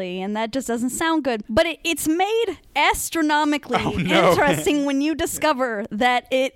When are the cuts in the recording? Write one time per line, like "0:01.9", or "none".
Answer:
0:01.4